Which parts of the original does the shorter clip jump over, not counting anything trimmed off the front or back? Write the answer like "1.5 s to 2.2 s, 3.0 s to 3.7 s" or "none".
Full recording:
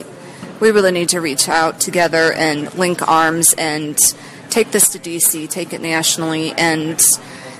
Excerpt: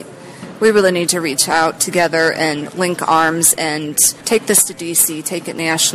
4.1 s to 4.3 s